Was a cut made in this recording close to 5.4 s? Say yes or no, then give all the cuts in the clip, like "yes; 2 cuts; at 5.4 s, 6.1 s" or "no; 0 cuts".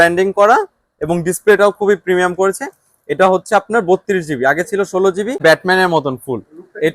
yes; 1 cut; at 5.4 s